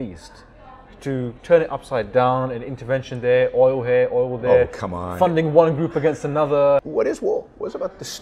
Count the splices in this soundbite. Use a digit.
1